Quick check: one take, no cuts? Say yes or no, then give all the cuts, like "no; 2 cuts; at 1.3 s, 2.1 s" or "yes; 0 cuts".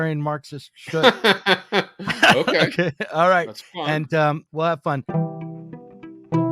no; 1 cut; at 5.0 s